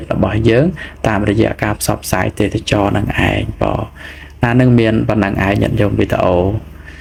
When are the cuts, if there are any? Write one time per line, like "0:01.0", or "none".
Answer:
none

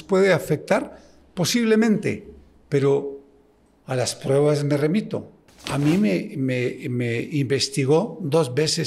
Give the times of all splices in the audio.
none

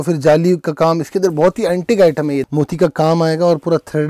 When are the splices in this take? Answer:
0:02.4

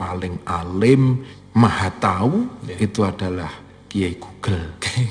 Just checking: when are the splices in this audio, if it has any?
0:01.3

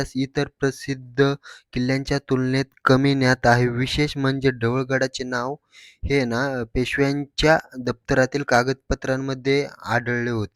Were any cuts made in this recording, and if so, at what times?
none

